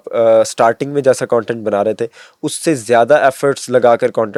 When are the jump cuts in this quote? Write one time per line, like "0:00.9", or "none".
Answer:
none